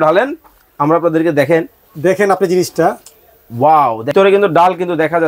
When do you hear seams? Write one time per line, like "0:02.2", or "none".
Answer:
0:04.1